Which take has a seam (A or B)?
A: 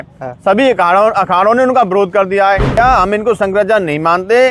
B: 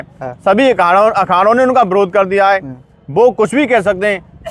A